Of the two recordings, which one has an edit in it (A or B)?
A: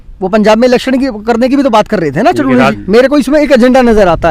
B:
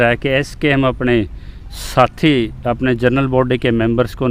A